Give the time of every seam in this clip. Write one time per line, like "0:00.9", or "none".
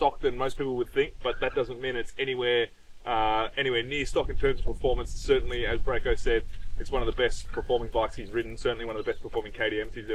none